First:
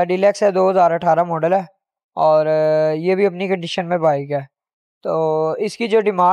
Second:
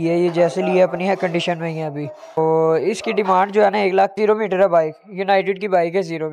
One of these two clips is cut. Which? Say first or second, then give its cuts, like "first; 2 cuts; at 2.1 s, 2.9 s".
second; 2 cuts; at 2.4 s, 4.1 s